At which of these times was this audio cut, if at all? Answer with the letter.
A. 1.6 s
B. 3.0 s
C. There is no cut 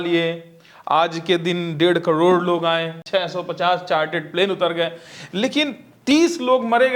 B